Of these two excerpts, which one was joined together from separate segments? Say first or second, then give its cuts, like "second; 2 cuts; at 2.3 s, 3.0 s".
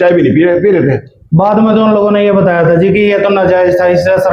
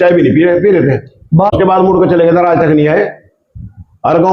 second; 1 cut; at 1.5 s